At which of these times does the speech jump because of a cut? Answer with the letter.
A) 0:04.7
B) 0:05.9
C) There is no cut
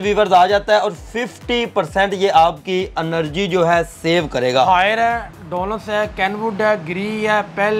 A